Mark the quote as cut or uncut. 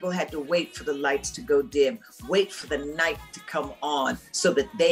uncut